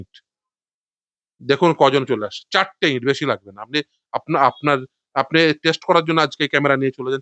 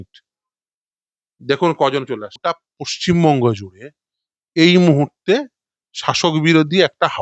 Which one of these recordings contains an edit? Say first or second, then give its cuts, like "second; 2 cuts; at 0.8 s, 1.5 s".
second; 1 cut; at 2.3 s